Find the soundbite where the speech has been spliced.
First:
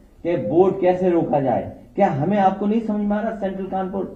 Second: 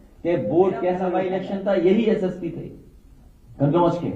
second; 1 cut; at 1.0 s

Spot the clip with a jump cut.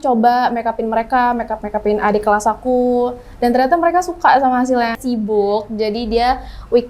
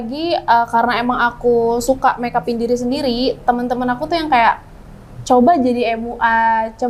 first; 1 cut; at 5.0 s

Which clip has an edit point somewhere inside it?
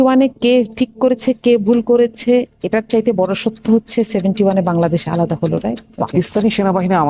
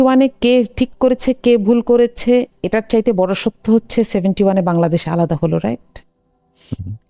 first; 1 cut; at 5.9 s

